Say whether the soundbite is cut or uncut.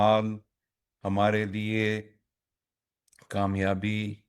uncut